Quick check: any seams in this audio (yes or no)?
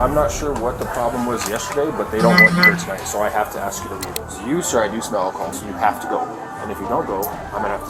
yes